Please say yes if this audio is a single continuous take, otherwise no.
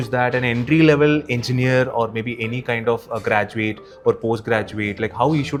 yes